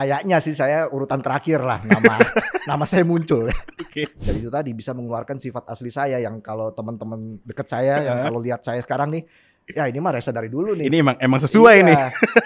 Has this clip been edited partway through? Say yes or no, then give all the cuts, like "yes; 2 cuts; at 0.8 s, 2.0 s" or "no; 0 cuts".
yes; 1 cut; at 4.2 s